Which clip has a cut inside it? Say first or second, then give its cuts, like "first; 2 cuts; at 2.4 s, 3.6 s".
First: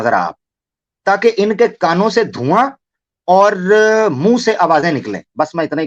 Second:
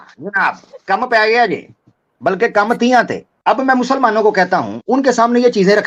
second; 2 cuts; at 3.2 s, 4.7 s